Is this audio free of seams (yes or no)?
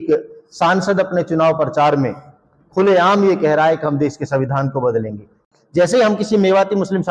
no